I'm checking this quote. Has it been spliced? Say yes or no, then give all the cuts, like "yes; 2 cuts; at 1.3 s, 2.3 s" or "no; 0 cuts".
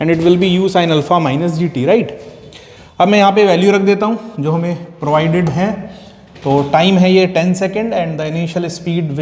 no; 0 cuts